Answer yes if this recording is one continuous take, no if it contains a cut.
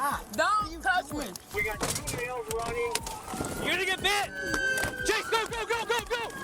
no